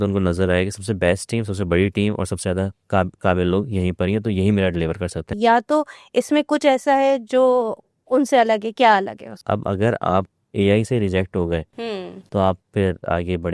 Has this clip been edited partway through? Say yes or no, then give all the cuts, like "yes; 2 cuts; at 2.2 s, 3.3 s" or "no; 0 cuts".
yes; 2 cuts; at 5.3 s, 9.3 s